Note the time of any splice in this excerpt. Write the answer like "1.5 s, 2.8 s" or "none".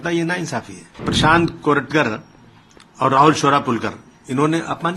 1.1 s